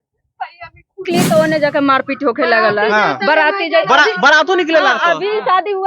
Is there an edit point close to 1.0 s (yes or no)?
yes